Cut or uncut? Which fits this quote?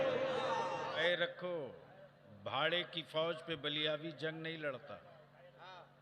cut